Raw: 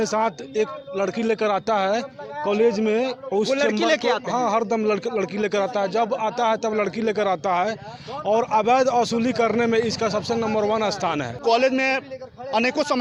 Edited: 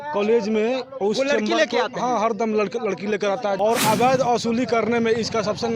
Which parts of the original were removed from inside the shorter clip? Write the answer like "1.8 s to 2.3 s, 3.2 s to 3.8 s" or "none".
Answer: 5.9 s to 8.2 s